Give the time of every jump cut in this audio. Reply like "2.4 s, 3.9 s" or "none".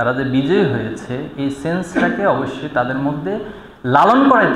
none